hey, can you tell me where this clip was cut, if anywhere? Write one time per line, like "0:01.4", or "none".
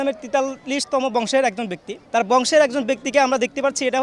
0:02.0